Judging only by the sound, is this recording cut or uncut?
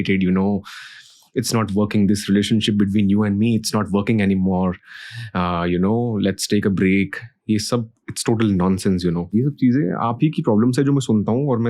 cut